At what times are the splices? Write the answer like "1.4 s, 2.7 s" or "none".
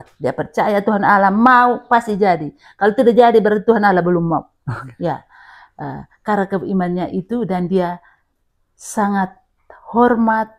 none